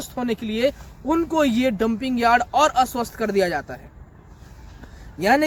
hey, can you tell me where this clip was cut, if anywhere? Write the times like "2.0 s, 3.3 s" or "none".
none